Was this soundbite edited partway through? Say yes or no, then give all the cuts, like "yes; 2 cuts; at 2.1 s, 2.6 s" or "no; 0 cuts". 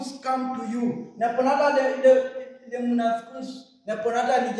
no; 0 cuts